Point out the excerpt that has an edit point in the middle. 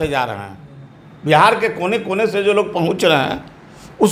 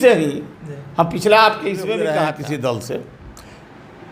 second; 1 cut; at 2.2 s

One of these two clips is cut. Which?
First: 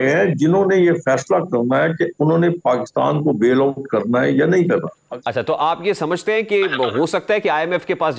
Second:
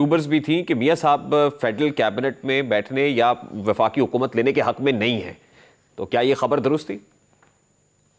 first; 1 cut; at 5.0 s

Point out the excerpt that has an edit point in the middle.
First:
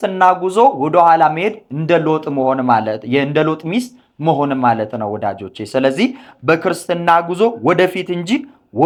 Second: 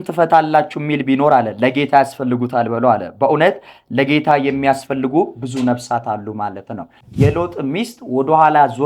second; 1 cut; at 7.0 s

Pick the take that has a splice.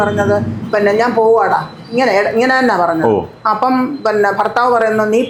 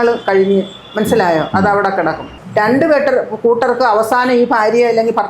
second; 1 cut; at 2.4 s

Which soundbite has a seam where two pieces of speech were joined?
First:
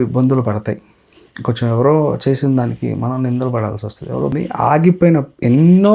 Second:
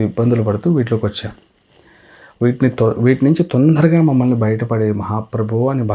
first; 1 cut; at 4.3 s

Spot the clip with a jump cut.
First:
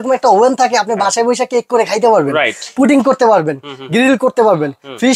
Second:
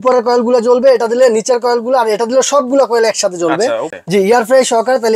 second; 1 cut; at 3.9 s

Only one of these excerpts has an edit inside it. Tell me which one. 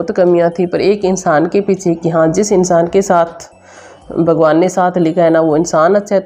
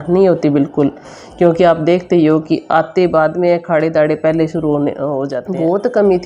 second; 1 cut; at 5.4 s

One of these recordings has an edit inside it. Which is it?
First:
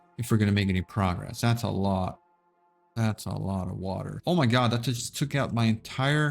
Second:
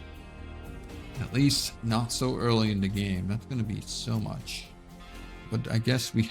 first; 1 cut; at 4.1 s

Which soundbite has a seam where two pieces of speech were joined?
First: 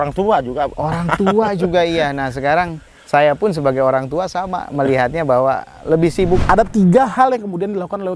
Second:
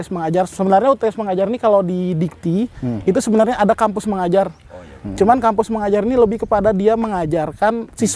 first; 1 cut; at 6.4 s

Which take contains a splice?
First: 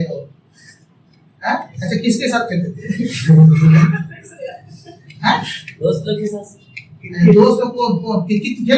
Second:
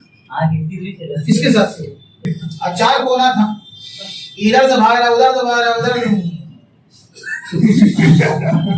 second; 1 cut; at 2.3 s

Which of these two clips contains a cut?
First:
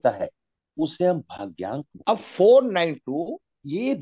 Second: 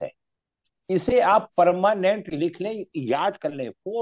first; 1 cut; at 2.0 s

